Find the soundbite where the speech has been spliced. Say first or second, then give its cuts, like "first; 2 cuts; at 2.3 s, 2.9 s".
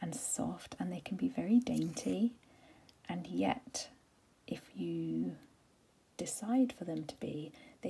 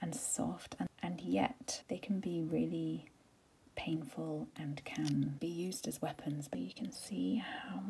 second; 4 cuts; at 0.9 s, 1.7 s, 5.4 s, 6.5 s